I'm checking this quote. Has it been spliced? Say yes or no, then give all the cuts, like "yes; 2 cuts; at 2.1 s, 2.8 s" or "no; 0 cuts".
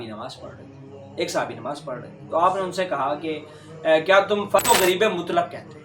yes; 1 cut; at 4.6 s